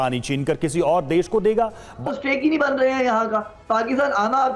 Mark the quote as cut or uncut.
cut